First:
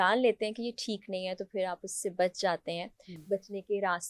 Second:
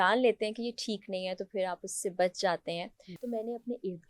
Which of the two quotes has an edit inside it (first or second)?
second